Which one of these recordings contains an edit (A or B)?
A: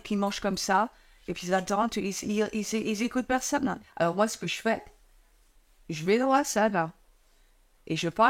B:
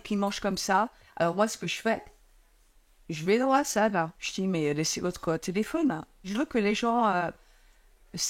B